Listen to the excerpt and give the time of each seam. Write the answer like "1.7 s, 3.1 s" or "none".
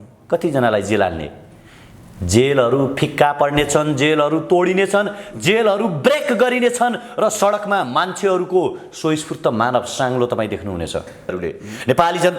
11.3 s